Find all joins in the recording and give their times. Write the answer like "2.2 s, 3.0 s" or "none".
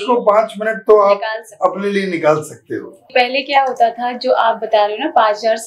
3.0 s